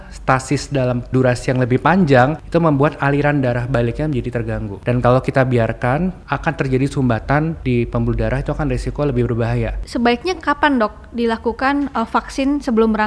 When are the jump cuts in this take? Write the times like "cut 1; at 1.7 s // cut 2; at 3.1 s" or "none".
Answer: cut 1; at 1.1 s // cut 2; at 2.4 s // cut 3; at 4.7 s // cut 4; at 6.3 s // cut 5; at 7.6 s // cut 6; at 9.8 s